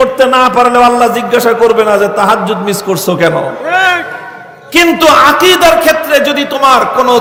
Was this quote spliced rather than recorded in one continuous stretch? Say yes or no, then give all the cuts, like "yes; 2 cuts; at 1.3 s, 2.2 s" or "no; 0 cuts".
no; 0 cuts